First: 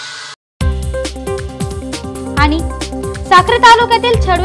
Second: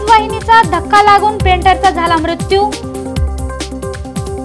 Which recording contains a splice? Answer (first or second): first